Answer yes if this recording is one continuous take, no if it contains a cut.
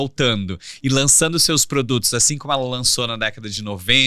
yes